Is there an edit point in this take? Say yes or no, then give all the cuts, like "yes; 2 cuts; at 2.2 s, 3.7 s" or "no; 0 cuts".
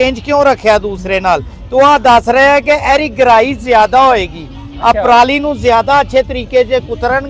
no; 0 cuts